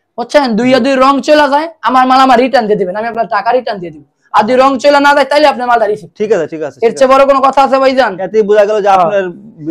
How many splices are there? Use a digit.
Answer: 0